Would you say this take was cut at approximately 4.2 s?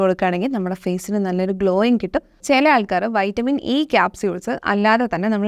no; 1 cut; at 2.4 s

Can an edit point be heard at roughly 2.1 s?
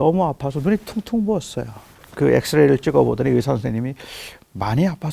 yes; 1 cut; at 2.1 s

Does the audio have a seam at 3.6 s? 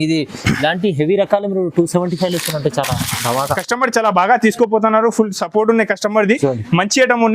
yes; 1 cut; at 3.6 s

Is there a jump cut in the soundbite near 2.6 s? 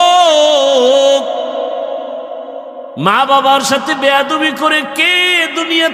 no; 0 cuts

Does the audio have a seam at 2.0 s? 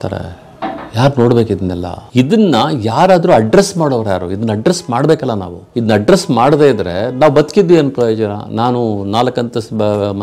yes; 2 cuts; at 2.0 s, 5.6 s

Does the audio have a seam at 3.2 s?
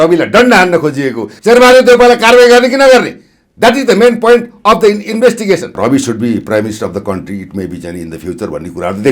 no; 2 cuts; at 1.3 s, 5.7 s

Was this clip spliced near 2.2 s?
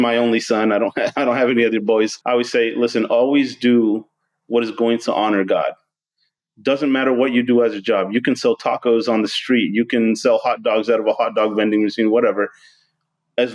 yes; 1 cut; at 2.2 s

